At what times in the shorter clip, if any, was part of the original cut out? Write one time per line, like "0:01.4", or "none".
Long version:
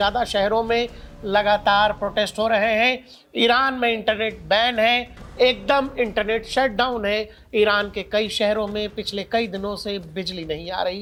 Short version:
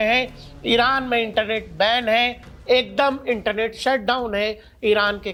none